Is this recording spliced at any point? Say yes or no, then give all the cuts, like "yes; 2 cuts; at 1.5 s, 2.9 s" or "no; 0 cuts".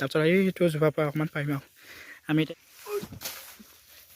yes; 1 cut; at 2.5 s